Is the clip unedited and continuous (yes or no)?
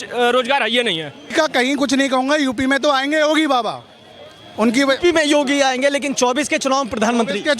no